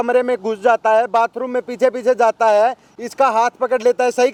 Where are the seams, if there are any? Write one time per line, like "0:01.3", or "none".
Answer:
none